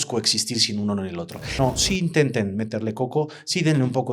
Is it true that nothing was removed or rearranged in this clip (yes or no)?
no